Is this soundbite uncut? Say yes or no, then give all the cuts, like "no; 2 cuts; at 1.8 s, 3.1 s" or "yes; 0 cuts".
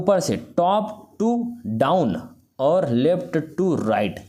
yes; 0 cuts